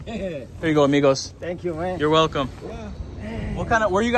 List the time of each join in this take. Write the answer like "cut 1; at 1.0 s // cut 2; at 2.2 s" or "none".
none